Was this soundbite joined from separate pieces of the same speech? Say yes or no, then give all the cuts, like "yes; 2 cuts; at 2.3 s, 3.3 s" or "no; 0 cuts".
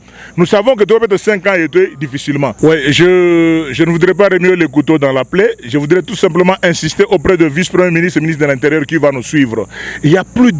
yes; 1 cut; at 2.5 s